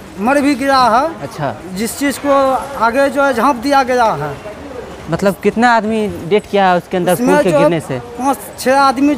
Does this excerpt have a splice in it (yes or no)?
no